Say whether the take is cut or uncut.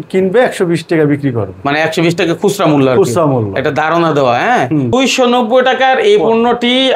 cut